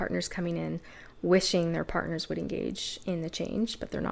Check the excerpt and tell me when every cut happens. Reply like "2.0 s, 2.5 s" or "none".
none

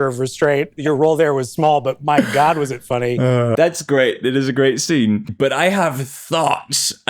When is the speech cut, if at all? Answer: 3.3 s

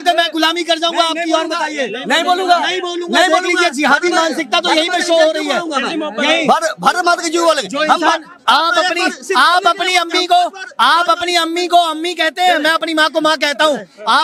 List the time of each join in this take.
none

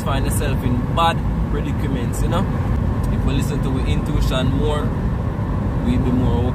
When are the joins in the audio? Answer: 2.7 s

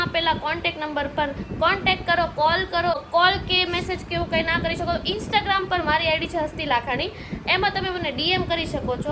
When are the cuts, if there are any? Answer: 3.0 s

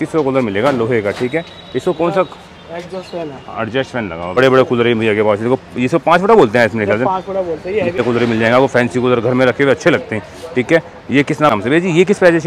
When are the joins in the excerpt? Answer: 4.4 s, 8.0 s, 11.5 s

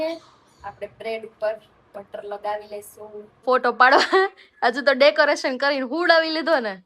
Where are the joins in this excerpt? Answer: 3.4 s

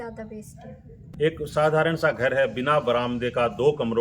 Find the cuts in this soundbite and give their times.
1.0 s

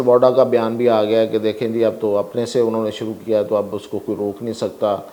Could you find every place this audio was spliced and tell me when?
none

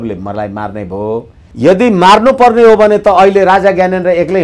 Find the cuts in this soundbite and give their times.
1.4 s

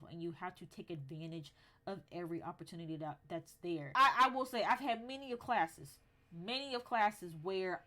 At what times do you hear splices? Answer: 3.9 s

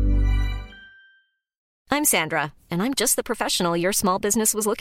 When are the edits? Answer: 1.6 s

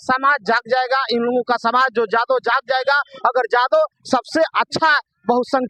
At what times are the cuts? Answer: none

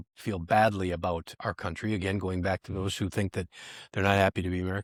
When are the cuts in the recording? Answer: none

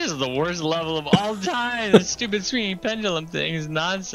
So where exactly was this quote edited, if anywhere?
none

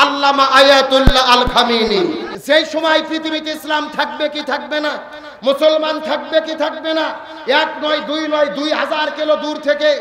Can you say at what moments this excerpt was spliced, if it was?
2.3 s

